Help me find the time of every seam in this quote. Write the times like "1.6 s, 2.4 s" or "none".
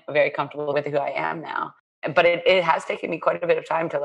0.7 s, 1.9 s